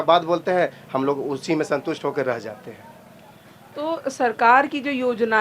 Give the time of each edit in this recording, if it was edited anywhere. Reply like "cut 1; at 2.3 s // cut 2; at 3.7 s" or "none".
none